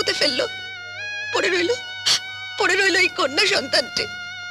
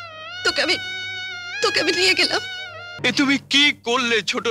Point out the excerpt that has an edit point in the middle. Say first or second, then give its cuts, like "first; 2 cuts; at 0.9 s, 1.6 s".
second; 1 cut; at 2.9 s